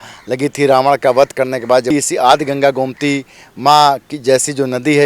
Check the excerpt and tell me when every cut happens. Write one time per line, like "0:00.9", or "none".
0:01.9